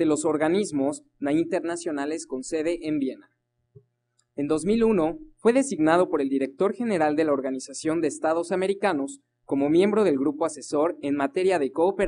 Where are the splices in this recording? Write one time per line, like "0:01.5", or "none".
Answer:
0:04.2